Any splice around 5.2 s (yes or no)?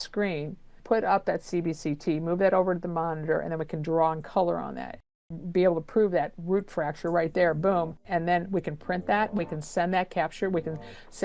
yes